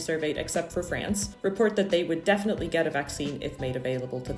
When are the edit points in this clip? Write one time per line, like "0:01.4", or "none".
none